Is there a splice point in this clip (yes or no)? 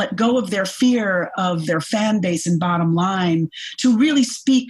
no